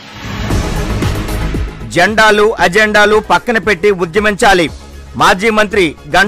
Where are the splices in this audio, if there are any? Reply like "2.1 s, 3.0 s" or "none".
none